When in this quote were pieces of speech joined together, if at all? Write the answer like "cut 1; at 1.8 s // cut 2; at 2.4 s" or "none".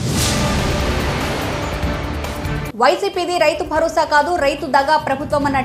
cut 1; at 2.2 s

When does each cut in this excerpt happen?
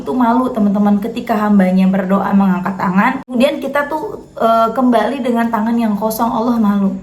cut 1; at 3.3 s

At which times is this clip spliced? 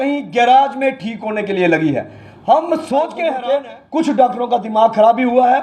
cut 1; at 3.4 s

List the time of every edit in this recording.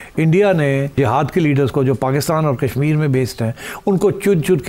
cut 1; at 0.9 s

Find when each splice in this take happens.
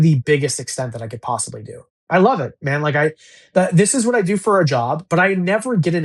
cut 1; at 2.1 s

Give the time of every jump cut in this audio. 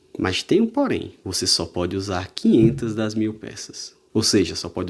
none

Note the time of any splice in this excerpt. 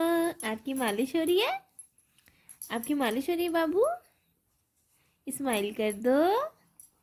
none

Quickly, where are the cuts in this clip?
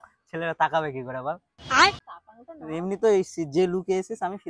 cut 1; at 1.5 s // cut 2; at 2.1 s

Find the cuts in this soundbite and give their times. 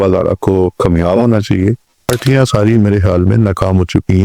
cut 1; at 2.2 s

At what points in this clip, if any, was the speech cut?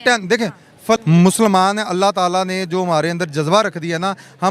cut 1; at 1.0 s

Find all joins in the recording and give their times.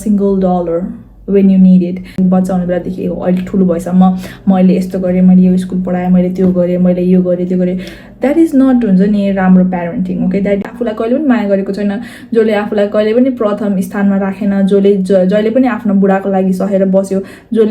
cut 1; at 2.2 s // cut 2; at 10.6 s

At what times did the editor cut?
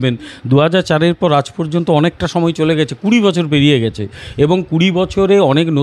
none

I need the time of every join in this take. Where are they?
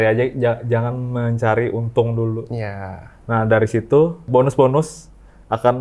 cut 1; at 4.3 s

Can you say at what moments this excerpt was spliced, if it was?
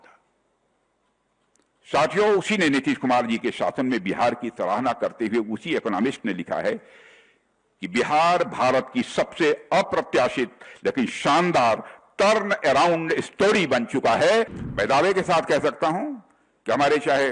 cut 1; at 14.6 s

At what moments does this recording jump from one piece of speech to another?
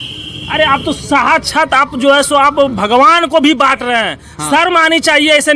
none

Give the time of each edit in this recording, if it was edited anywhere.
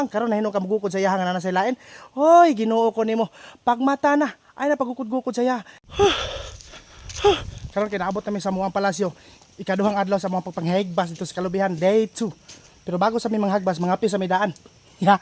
cut 1; at 5.8 s

